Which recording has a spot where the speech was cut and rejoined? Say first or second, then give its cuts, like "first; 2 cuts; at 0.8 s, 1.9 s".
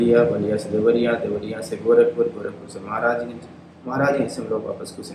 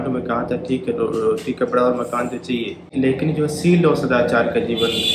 second; 1 cut; at 2.9 s